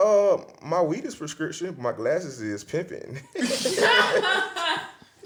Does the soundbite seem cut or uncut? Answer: uncut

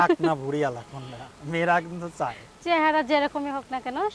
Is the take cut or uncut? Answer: uncut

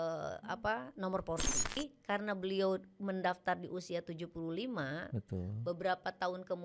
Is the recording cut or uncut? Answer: cut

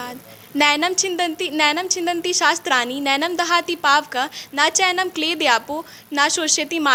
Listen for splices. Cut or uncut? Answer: uncut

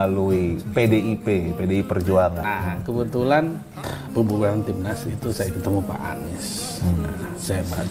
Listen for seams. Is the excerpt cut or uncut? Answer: cut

